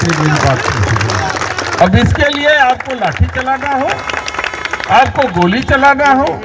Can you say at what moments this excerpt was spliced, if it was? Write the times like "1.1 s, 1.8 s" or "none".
1.8 s